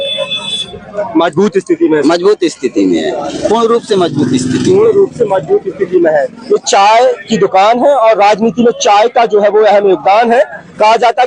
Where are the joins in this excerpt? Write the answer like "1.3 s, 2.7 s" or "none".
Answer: none